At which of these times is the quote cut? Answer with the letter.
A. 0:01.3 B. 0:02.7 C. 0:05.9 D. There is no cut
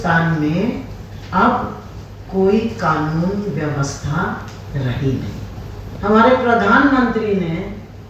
C